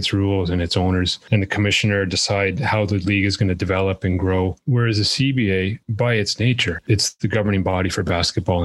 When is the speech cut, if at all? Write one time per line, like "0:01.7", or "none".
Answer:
0:04.6
0:05.8
0:06.8